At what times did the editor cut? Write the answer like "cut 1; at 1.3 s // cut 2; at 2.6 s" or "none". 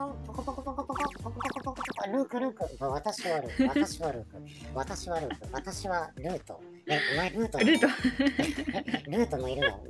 none